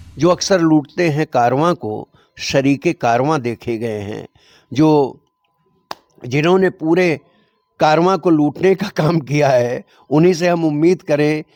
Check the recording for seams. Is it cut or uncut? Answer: uncut